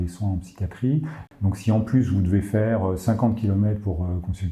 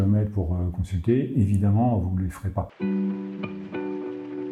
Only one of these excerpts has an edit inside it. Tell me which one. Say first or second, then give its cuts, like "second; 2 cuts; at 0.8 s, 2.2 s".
first; 1 cut; at 1.3 s